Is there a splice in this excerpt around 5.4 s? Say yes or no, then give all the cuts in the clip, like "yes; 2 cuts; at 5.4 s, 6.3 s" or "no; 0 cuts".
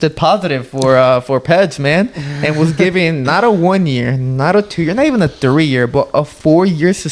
no; 0 cuts